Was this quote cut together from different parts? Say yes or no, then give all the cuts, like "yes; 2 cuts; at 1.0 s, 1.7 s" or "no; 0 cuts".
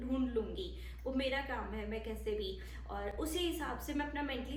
no; 0 cuts